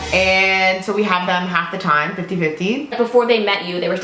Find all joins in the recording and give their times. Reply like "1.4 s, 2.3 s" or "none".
2.9 s

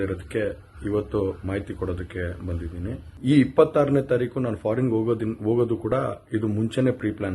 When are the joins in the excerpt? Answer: 2.6 s

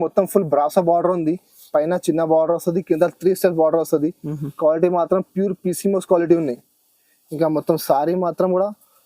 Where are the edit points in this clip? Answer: none

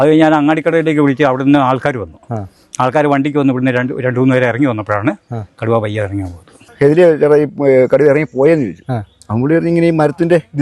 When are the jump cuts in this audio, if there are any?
6.6 s

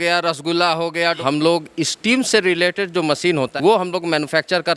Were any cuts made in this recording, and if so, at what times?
1.2 s, 3.5 s

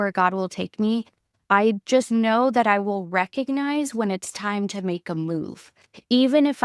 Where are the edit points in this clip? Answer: none

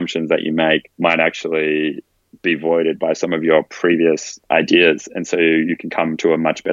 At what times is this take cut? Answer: 0.9 s, 4.3 s

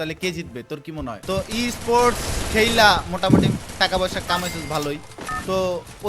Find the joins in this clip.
1.2 s

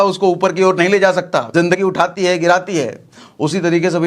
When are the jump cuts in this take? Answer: 1.8 s

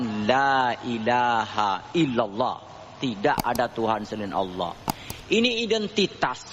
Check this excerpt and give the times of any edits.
none

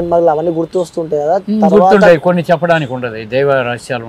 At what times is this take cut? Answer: none

